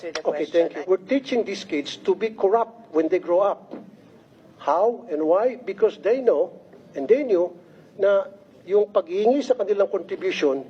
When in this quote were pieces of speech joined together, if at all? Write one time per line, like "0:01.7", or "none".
none